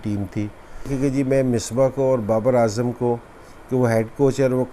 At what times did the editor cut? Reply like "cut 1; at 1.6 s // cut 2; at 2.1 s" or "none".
cut 1; at 0.9 s